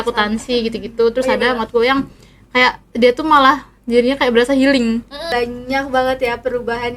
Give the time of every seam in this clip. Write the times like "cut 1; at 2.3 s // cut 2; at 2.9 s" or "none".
cut 1; at 5.3 s